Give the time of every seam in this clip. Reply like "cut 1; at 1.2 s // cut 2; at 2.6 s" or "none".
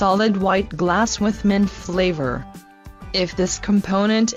none